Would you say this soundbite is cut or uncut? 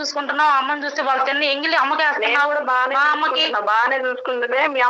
uncut